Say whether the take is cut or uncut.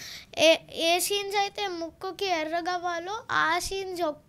uncut